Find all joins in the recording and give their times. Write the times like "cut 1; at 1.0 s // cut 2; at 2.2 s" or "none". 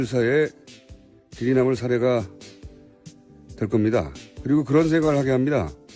cut 1; at 3.4 s